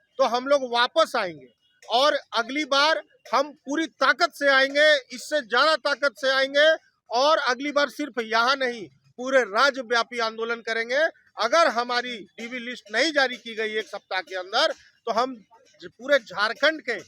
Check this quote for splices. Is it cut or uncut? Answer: uncut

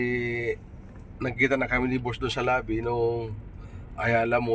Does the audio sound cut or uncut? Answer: uncut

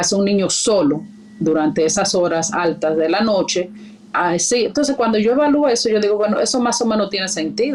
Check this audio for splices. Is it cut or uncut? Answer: uncut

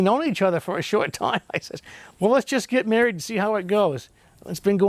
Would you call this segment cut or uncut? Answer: uncut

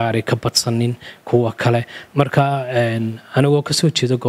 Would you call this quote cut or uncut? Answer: cut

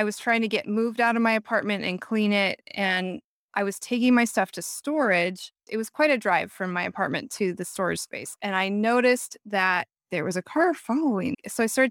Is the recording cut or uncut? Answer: uncut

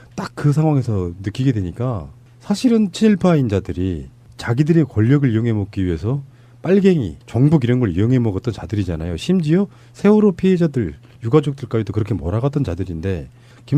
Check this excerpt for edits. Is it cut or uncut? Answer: cut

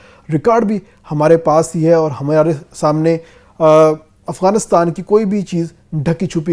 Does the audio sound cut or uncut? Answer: uncut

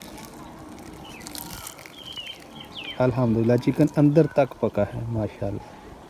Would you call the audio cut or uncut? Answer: cut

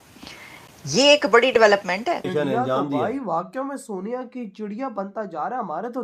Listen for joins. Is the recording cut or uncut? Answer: cut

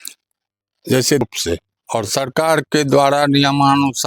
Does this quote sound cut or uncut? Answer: cut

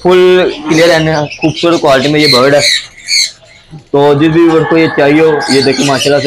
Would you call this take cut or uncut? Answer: uncut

